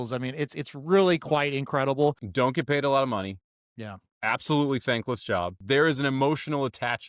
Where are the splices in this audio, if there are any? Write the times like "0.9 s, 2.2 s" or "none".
2.2 s, 5.6 s